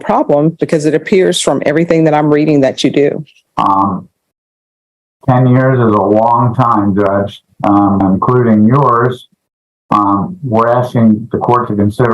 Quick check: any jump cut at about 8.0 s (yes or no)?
yes